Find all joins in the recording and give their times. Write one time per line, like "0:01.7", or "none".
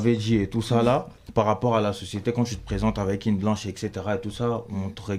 none